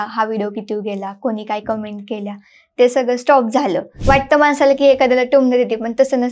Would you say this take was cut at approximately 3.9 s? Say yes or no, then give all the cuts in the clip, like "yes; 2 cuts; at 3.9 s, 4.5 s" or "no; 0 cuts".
yes; 1 cut; at 3.9 s